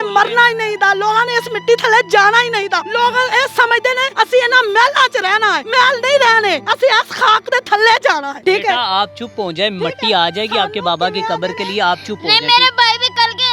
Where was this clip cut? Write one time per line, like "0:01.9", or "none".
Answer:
0:02.9
0:04.1
0:05.6
0:06.7
0:08.3